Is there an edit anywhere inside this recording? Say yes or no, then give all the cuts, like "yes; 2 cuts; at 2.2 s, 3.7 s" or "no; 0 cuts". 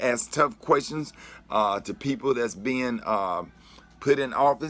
yes; 1 cut; at 2.2 s